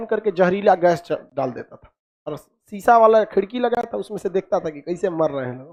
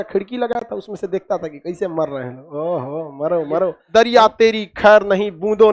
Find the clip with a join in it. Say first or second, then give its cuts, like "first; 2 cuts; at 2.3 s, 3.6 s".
second; 1 cut; at 3.8 s